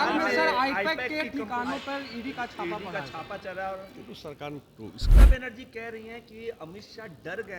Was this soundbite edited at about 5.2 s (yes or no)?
yes